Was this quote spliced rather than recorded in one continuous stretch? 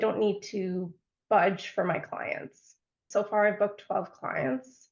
yes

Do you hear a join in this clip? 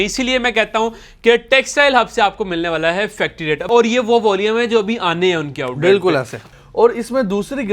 yes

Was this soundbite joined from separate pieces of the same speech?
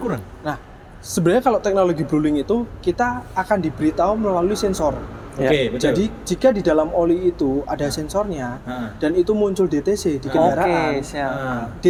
no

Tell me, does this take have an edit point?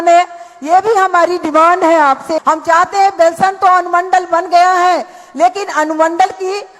yes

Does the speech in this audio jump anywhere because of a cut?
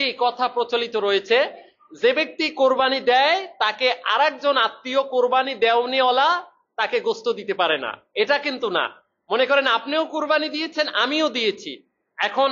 no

